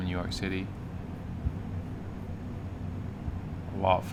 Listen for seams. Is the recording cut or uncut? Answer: uncut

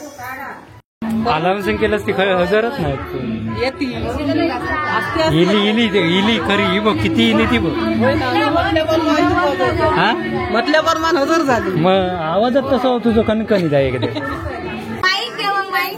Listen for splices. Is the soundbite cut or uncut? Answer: cut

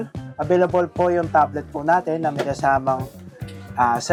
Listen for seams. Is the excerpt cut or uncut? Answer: uncut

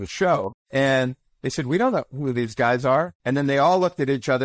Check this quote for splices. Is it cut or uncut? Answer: cut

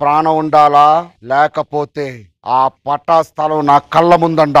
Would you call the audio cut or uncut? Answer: uncut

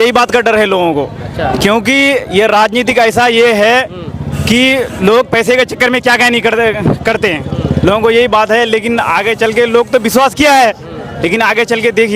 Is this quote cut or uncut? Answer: uncut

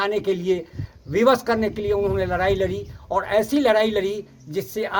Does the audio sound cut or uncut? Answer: uncut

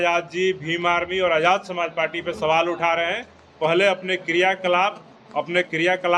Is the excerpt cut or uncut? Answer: uncut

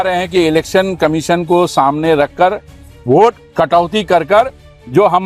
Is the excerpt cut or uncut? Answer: cut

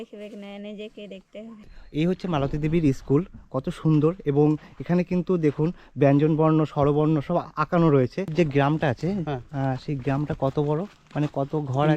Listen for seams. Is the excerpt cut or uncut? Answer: cut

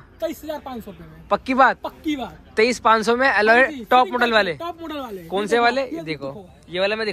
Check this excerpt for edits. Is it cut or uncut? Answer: uncut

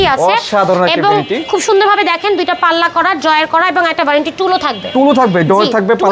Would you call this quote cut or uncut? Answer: uncut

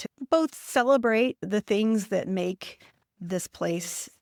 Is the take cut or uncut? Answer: uncut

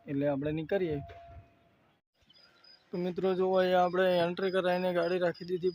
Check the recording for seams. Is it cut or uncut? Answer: cut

